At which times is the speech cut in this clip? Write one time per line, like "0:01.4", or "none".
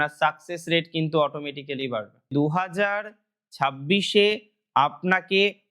0:02.3